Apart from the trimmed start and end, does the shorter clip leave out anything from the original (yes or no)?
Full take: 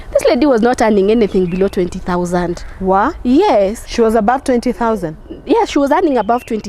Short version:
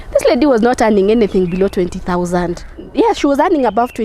yes